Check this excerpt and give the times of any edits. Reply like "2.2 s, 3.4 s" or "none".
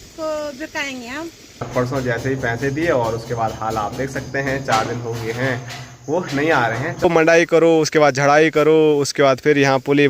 1.7 s, 7.0 s